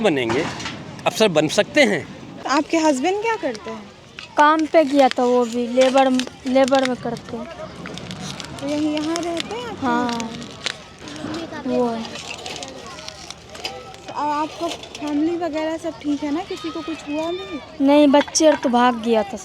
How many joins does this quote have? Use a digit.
0